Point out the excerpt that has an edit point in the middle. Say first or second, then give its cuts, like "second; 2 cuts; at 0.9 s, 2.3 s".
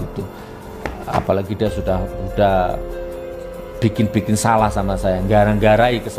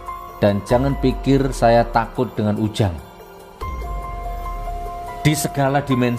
second; 2 cuts; at 3.0 s, 4.8 s